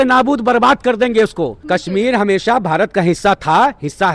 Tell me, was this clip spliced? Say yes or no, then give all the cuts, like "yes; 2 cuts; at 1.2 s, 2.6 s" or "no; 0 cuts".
yes; 1 cut; at 1.6 s